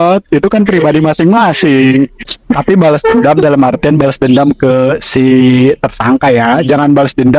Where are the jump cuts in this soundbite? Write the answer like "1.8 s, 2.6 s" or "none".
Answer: 2.3 s